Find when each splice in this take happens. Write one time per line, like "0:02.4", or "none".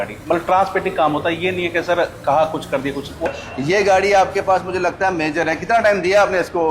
0:03.3